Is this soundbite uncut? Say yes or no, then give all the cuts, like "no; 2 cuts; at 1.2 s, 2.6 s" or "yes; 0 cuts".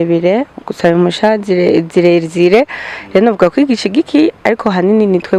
yes; 0 cuts